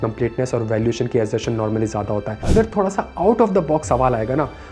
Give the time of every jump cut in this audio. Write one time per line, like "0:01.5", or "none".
0:02.4